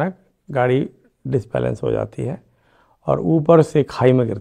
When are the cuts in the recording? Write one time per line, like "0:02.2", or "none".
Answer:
none